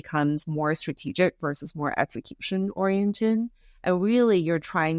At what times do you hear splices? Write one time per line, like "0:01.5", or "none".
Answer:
0:03.7